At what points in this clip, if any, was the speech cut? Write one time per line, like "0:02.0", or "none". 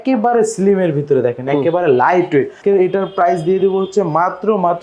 0:02.6